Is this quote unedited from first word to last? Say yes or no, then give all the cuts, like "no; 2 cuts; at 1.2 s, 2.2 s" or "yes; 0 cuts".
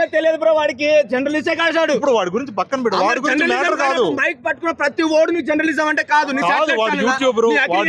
yes; 0 cuts